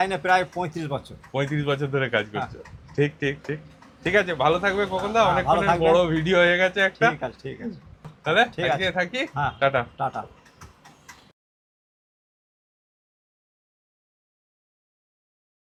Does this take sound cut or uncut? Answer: uncut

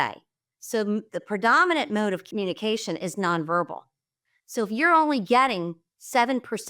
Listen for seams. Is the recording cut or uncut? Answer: cut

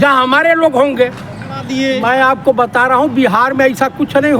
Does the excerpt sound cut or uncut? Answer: cut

